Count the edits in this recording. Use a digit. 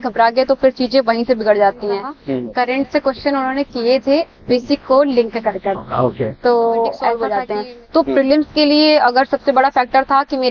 2